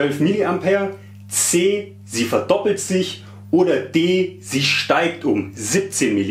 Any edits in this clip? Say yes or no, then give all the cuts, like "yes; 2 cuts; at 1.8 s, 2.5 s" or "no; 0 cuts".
no; 0 cuts